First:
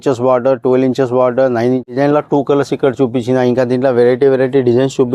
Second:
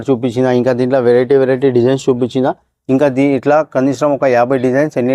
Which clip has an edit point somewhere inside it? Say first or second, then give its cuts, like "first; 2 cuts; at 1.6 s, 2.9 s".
first; 1 cut; at 1.9 s